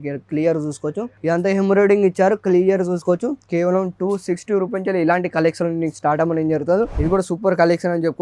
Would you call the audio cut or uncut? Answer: cut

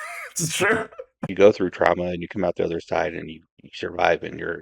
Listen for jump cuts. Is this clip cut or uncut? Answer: cut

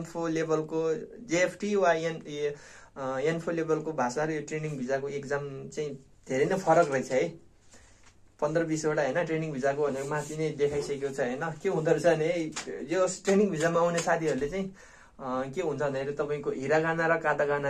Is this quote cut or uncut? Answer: uncut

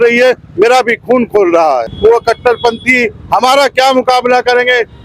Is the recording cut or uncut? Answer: cut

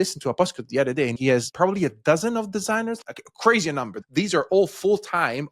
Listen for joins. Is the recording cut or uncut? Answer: cut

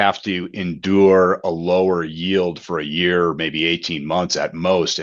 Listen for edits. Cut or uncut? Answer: uncut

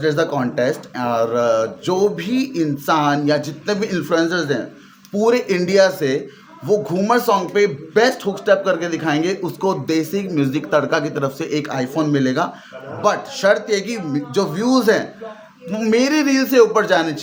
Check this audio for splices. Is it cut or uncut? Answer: uncut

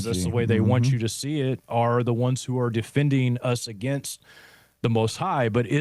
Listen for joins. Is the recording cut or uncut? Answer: uncut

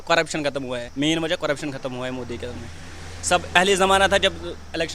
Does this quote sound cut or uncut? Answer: cut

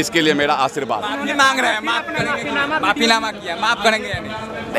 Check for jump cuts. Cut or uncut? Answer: uncut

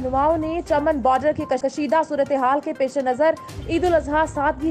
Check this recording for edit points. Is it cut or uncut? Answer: uncut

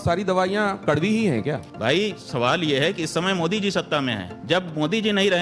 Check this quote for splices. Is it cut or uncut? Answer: cut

